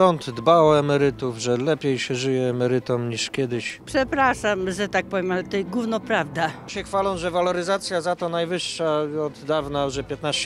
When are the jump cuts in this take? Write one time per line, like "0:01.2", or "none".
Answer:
0:03.7
0:06.7